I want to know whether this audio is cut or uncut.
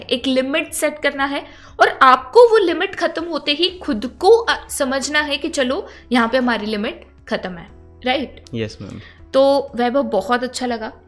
uncut